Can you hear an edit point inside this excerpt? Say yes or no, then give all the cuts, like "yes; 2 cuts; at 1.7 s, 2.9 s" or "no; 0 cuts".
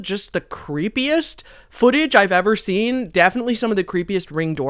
no; 0 cuts